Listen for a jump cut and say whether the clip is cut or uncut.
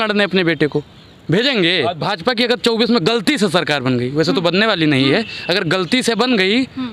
cut